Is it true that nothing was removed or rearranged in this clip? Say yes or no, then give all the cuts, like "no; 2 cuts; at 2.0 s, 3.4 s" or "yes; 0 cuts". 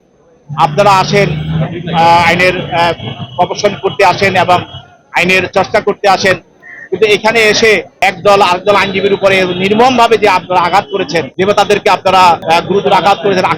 no; 1 cut; at 12.4 s